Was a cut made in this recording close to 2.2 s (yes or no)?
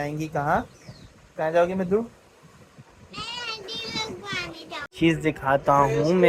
no